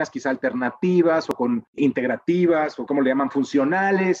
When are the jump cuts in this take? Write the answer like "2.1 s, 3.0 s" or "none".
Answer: 1.3 s, 2.9 s